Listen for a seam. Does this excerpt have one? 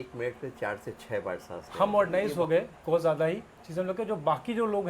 yes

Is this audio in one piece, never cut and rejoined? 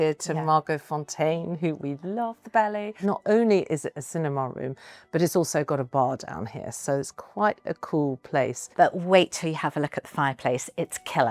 no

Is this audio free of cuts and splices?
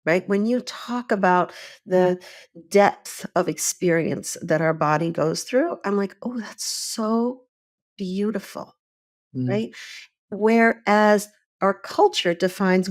yes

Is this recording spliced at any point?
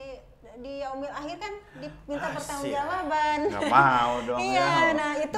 no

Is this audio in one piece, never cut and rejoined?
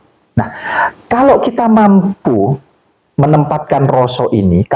yes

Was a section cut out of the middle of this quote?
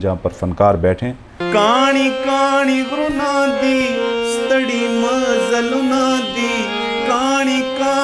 yes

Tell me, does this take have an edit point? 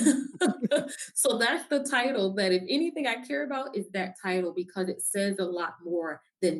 no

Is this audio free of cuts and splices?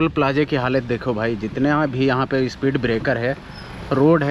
yes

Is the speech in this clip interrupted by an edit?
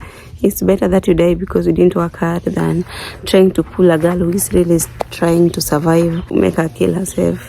yes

